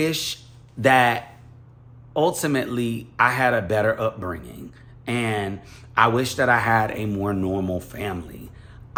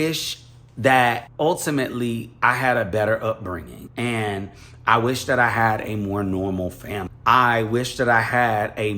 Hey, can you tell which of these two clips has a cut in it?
second; 3 cuts; at 1.3 s, 3.8 s, 7.1 s

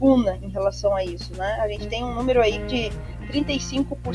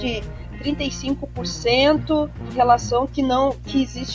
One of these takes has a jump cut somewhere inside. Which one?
second; 1 cut; at 2.4 s

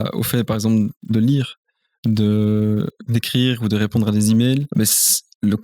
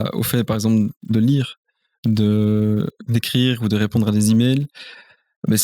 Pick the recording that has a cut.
first; 1 cut; at 4.7 s

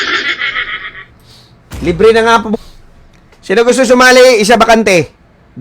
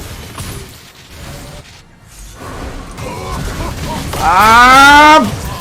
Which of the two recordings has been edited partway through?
first; 1 cut; at 2.5 s

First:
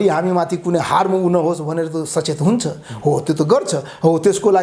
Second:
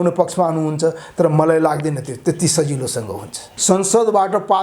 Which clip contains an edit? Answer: second; 1 cut; at 3.5 s

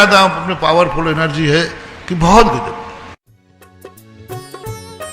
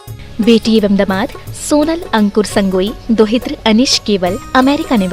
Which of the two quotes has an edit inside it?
first; 1 cut; at 3.4 s

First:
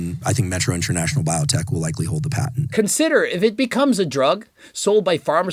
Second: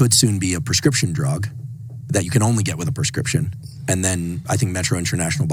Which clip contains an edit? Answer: first; 1 cut; at 2.7 s

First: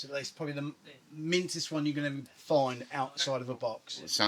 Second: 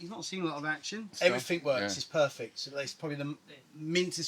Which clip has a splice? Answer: second; 1 cut; at 1.1 s

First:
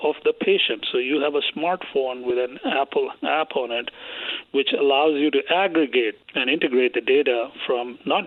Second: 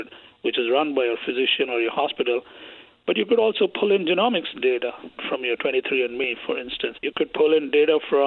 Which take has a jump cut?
second; 2 cuts; at 5.1 s, 7.0 s

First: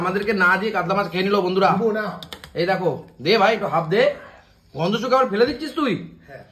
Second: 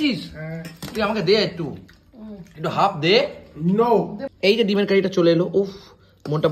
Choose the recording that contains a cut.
second; 1 cut; at 4.2 s

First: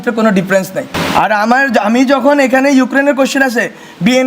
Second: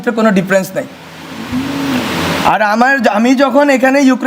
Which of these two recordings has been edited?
first; 1 cut; at 0.9 s

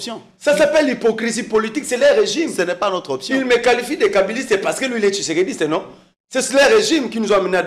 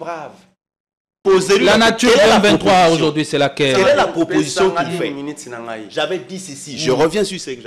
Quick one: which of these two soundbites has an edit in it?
second; 1 cut; at 1.1 s

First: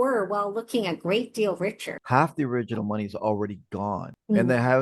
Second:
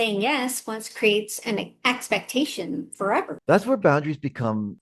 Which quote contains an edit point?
first; 1 cut; at 1.9 s

